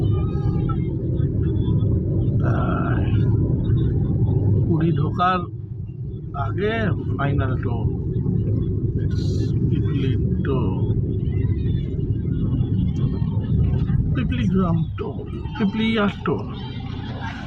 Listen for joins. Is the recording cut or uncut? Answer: uncut